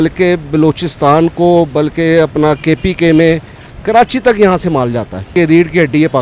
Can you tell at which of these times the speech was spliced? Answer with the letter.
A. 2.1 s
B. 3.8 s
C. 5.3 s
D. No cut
C